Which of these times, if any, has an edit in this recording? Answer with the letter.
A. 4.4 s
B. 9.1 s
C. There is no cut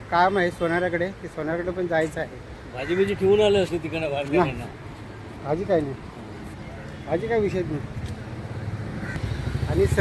B